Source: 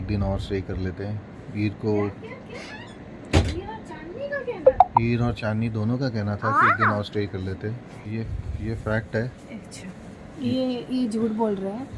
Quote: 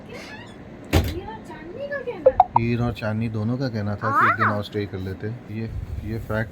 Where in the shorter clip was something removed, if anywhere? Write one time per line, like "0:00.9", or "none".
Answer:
0:05.4